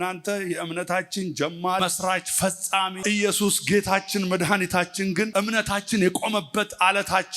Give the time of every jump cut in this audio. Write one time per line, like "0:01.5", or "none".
0:01.8
0:03.0
0:05.3